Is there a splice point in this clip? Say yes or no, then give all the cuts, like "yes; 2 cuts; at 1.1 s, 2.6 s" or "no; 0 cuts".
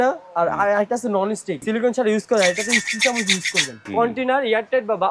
yes; 2 cuts; at 1.5 s, 3.7 s